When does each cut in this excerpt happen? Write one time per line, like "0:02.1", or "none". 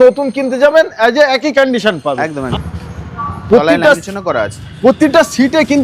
0:02.4

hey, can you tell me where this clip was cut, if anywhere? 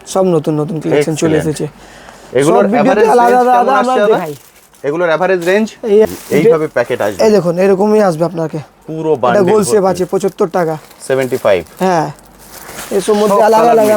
0:06.1

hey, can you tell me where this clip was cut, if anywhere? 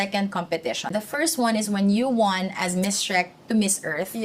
0:00.9

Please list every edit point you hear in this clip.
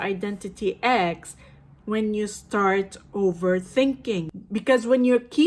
0:04.3

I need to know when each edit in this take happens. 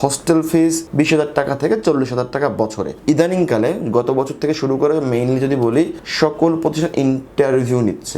0:02.9

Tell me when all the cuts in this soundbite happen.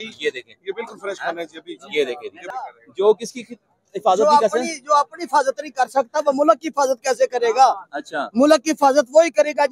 0:02.5

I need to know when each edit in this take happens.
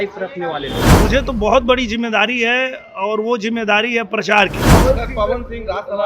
0:00.9
0:04.6

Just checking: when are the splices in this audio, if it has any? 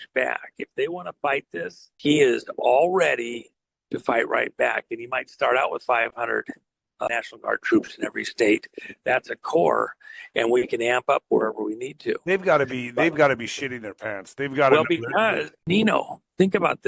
0:01.8
0:07.1
0:15.5

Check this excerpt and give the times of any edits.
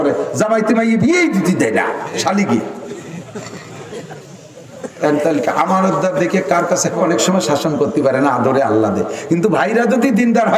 0:07.0

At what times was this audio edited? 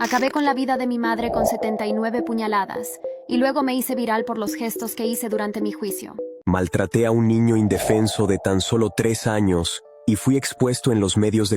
0:06.3

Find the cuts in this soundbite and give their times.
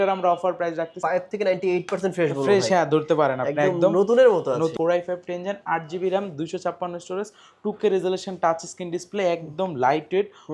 0:00.9
0:04.7

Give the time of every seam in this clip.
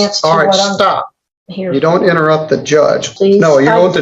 0:03.1

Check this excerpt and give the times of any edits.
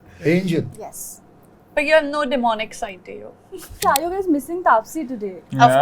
0:03.8

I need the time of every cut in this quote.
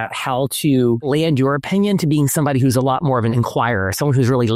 0:01.0
0:03.3

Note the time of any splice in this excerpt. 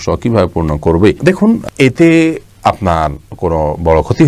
none

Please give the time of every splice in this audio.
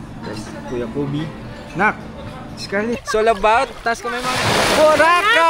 0:03.0

